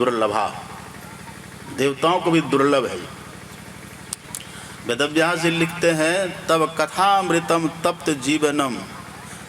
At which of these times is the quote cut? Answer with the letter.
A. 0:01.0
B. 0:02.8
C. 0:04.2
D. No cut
C